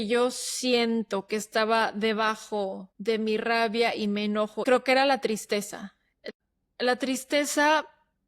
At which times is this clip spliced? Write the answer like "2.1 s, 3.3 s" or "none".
2.9 s, 4.6 s, 6.2 s